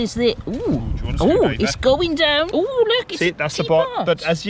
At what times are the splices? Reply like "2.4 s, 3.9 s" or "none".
2.5 s

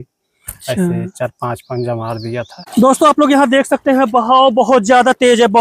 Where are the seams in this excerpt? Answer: 2.6 s

